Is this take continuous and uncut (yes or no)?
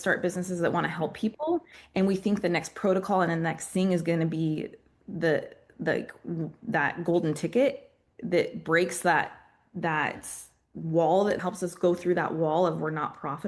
yes